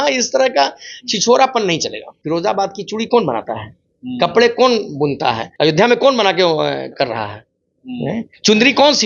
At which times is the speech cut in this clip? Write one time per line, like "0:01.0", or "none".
0:02.1
0:05.5